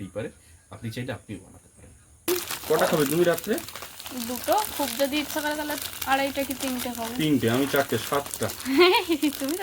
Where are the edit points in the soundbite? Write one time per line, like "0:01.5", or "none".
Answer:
0:02.3